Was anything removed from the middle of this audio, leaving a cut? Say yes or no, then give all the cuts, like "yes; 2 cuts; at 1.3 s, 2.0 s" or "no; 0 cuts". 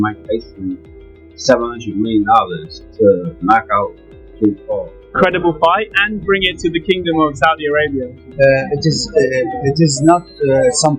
yes; 1 cut; at 5.1 s